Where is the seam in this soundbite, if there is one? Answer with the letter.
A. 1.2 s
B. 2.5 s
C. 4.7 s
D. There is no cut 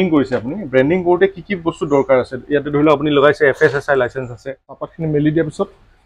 C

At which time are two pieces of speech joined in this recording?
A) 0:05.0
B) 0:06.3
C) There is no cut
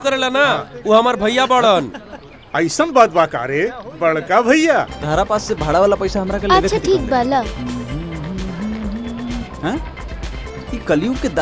A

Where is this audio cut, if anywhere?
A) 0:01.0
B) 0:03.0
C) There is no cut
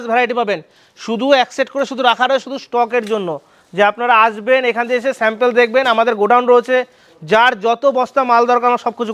C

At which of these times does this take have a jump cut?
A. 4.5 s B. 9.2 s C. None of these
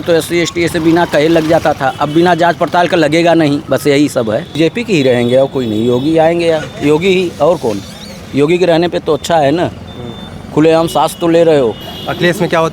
A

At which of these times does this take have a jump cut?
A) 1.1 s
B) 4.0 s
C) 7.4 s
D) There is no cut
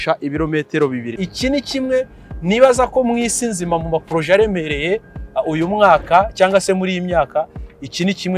A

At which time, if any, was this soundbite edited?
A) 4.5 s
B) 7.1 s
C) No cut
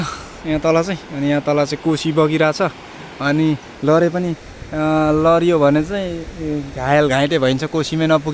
C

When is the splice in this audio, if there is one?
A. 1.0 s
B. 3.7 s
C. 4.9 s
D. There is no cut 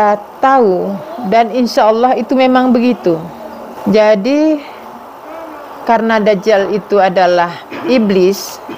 B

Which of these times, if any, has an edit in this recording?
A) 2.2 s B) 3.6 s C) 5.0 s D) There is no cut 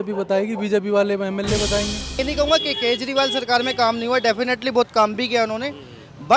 A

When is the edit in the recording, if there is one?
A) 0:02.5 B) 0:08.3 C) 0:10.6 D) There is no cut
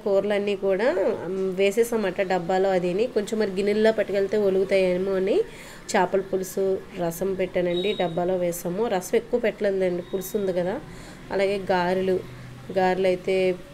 D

